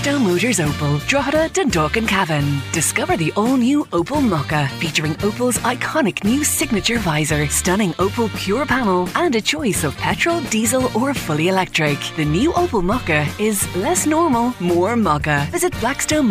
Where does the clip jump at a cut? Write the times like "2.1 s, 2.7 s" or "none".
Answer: none